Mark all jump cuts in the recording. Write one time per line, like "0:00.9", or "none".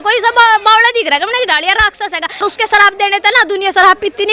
0:02.4